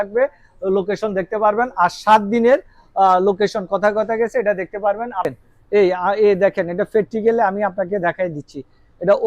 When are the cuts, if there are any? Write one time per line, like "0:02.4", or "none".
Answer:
0:05.3

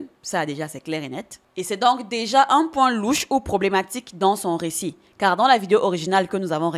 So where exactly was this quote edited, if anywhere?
none

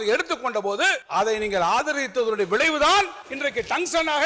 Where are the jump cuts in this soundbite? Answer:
0:01.0
0:03.2

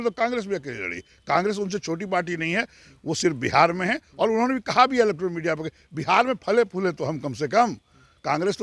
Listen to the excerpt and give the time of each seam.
none

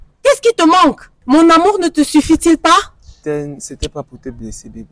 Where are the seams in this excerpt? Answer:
0:01.1
0:03.2

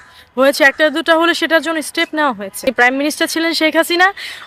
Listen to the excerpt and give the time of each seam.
0:02.7

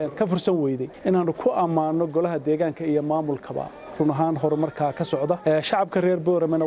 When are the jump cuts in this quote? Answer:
0:00.9
0:05.4

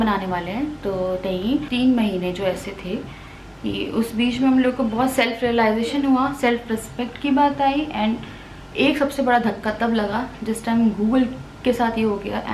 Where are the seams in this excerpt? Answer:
0:01.7

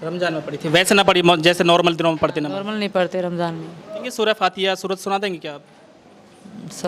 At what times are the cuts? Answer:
0:04.1

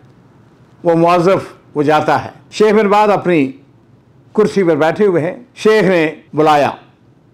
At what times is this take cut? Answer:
0:02.4
0:05.5
0:06.2

